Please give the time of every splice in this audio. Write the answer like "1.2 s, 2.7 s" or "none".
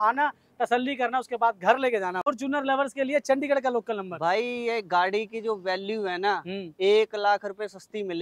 2.3 s

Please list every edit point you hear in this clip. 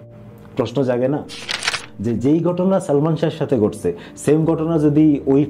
1.9 s

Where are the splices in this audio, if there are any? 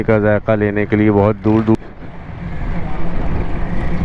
1.8 s

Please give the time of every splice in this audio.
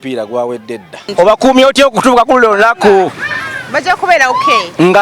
1.1 s

